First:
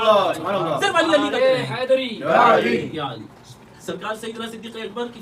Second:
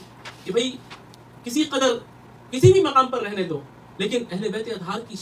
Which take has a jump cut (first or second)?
first